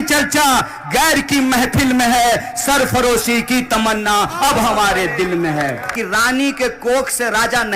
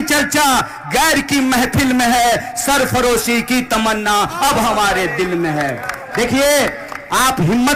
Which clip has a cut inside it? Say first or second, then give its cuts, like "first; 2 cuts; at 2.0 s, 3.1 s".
first; 1 cut; at 5.9 s